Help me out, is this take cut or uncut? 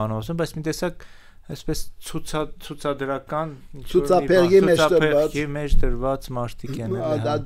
uncut